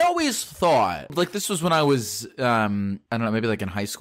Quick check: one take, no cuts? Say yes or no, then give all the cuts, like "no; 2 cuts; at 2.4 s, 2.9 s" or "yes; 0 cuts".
no; 2 cuts; at 1.1 s, 3.0 s